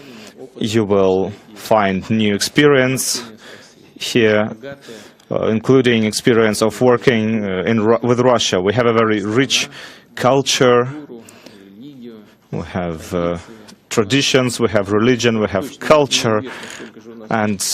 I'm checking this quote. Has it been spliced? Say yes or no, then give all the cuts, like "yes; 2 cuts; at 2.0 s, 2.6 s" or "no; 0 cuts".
yes; 1 cut; at 14.5 s